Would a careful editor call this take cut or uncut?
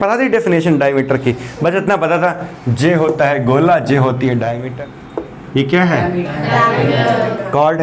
cut